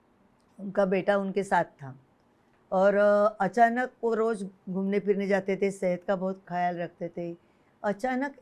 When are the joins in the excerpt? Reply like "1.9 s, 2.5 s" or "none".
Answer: 6.5 s